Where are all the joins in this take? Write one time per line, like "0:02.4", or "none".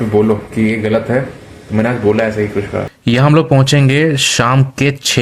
0:02.8

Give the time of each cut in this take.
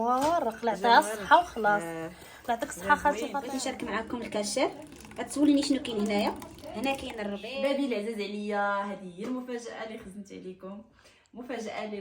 0:03.5
0:07.3

